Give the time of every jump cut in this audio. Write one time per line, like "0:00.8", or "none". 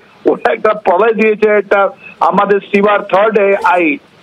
none